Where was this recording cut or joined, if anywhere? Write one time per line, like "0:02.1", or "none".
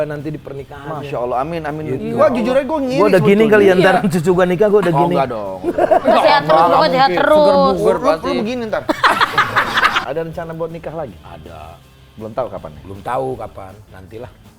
0:10.0